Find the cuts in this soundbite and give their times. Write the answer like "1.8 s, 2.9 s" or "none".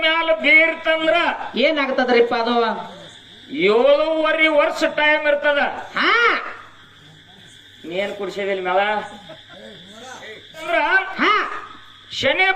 10.6 s